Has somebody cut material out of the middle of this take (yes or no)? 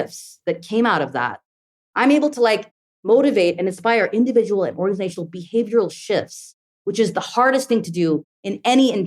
yes